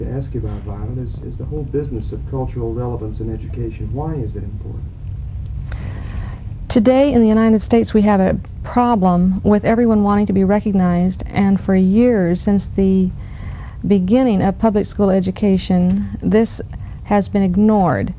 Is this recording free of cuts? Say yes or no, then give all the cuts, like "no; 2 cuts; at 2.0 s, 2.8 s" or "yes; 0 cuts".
yes; 0 cuts